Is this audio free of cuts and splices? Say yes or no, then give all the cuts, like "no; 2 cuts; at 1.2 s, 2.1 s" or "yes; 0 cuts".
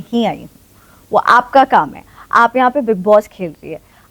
yes; 0 cuts